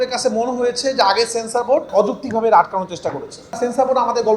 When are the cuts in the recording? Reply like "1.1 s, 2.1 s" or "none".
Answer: 1.9 s, 3.6 s